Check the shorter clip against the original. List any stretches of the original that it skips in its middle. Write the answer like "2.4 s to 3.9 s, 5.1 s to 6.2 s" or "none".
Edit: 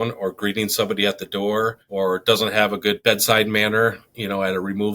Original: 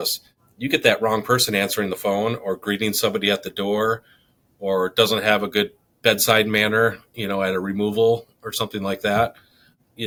4.1 s to 4.5 s, 5.7 s to 6.0 s